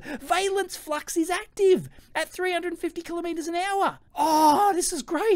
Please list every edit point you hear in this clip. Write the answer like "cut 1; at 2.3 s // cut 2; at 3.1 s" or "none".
cut 1; at 4.0 s

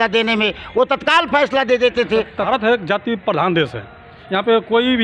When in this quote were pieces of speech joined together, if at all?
cut 1; at 2.4 s

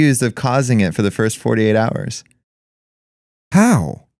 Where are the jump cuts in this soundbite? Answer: none

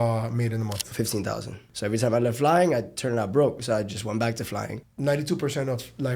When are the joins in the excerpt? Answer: cut 1; at 1.6 s // cut 2; at 4.8 s

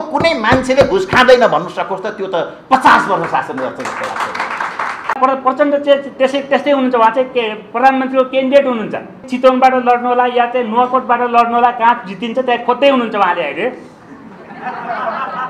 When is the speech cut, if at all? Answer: cut 1; at 5.1 s // cut 2; at 9.3 s

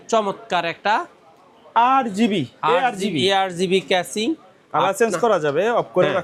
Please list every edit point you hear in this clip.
none

